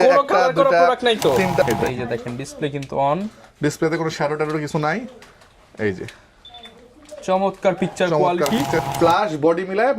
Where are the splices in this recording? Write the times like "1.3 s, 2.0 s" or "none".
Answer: 1.6 s, 8.8 s